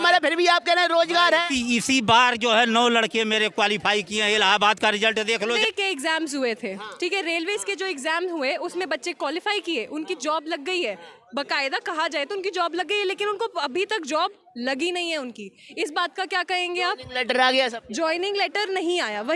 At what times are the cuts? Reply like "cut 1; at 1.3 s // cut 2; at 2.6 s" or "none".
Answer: cut 1; at 5.6 s